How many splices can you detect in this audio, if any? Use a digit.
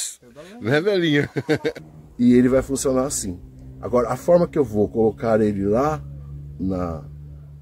1